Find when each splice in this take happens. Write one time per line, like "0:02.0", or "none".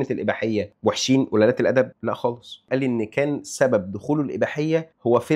0:02.6